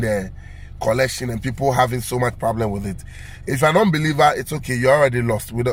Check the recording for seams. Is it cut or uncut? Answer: uncut